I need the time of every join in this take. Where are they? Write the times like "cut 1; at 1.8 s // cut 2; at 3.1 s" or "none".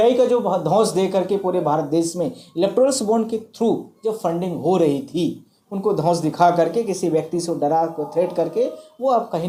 none

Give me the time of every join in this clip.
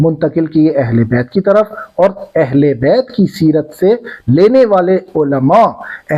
none

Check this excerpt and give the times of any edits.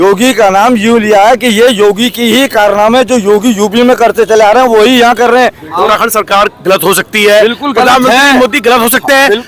cut 1; at 5.9 s

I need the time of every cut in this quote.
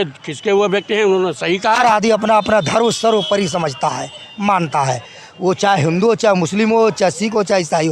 cut 1; at 1.8 s

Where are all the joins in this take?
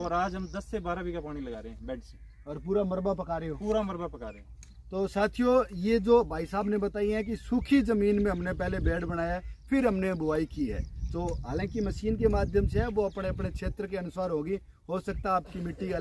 none

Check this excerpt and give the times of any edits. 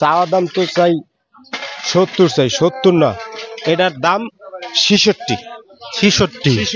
none

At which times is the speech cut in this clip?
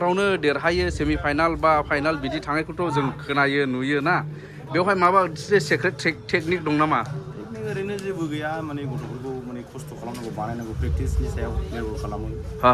none

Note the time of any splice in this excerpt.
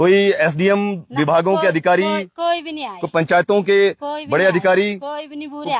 none

